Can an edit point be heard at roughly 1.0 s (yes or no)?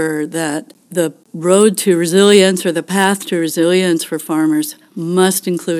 yes